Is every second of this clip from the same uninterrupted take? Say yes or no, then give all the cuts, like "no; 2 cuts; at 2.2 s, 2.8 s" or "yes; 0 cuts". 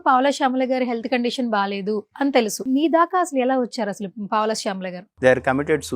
no; 2 cuts; at 2.6 s, 5.0 s